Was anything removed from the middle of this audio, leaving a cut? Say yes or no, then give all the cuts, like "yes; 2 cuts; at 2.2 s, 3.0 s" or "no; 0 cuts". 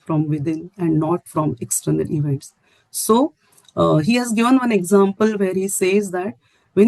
no; 0 cuts